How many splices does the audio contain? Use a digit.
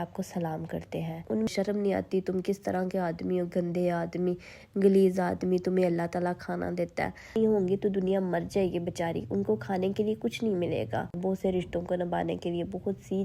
3